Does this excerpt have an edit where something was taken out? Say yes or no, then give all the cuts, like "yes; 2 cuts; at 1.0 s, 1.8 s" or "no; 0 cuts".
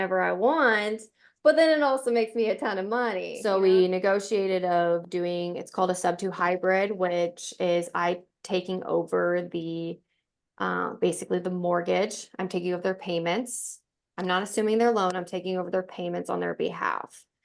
yes; 1 cut; at 3.3 s